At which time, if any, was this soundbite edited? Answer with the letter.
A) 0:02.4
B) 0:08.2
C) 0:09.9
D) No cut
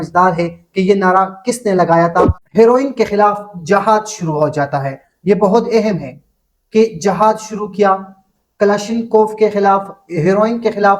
A